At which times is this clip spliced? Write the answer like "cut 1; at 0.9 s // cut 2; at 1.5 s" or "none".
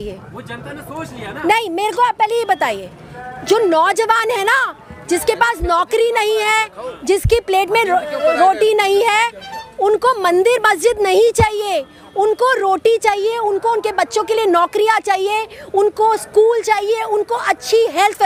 none